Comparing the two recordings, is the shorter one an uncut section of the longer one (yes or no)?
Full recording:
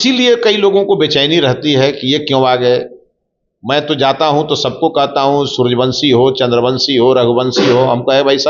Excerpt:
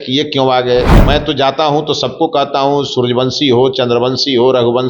no